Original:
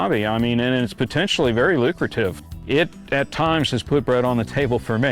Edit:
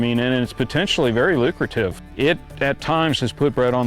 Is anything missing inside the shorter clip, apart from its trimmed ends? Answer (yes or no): yes